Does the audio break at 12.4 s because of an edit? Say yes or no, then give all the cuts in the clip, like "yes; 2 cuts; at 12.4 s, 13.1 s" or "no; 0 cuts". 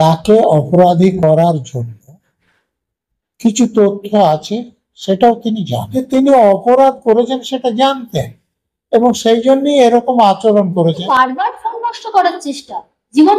no; 2 cuts; at 5.8 s, 11.0 s